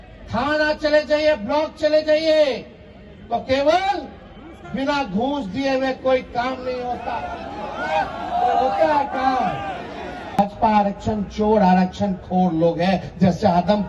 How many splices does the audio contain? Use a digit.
1